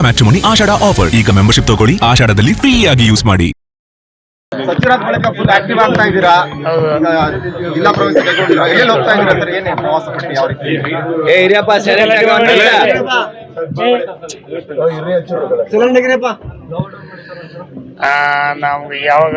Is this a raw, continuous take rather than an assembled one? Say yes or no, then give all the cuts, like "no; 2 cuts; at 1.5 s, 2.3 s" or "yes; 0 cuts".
no; 1 cut; at 4.3 s